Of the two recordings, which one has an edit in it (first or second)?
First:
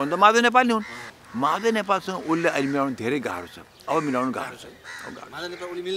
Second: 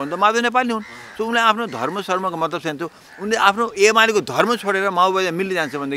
first